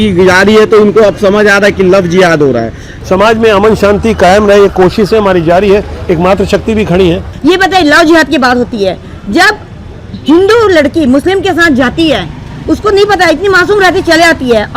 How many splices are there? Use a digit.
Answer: 0